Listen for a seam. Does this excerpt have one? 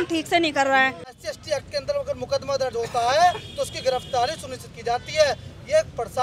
yes; 1 cut; at 1.2 s

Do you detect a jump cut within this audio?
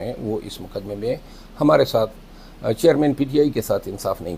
no; 0 cuts

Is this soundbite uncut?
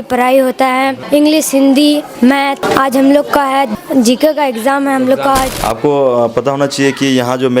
no; 4 cuts; at 1.0 s, 2.3 s, 3.7 s, 5.5 s

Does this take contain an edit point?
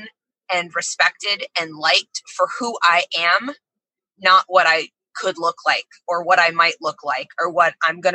no; 0 cuts

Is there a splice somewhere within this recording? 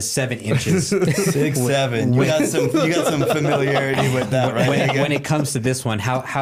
no; 0 cuts

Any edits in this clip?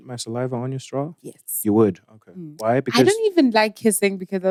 no; 0 cuts

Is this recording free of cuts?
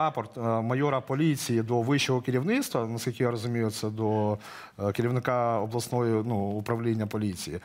yes; 0 cuts

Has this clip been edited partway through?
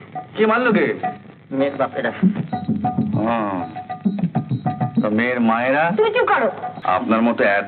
yes; 1 cut; at 6.7 s

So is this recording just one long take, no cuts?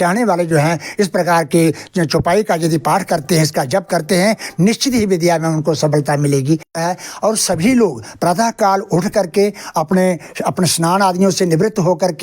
no; 1 cut; at 6.7 s

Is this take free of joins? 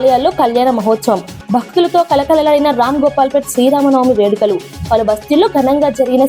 yes; 0 cuts

